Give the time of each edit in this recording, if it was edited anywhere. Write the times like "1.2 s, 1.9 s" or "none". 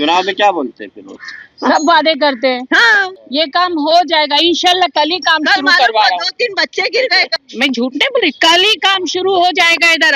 3.1 s, 7.3 s